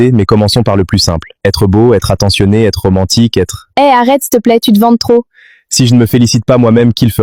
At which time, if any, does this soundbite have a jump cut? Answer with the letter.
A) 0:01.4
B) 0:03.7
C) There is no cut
C